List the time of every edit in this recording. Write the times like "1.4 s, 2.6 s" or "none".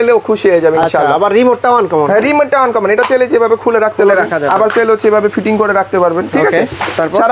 none